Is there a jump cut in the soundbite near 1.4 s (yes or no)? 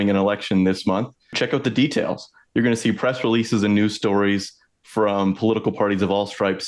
yes